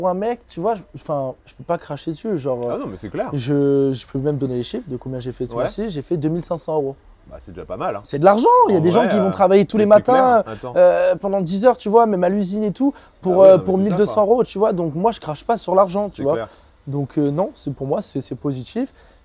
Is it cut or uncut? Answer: uncut